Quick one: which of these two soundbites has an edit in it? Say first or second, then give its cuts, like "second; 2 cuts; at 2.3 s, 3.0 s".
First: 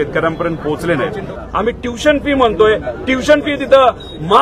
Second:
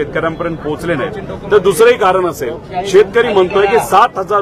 first; 1 cut; at 1.4 s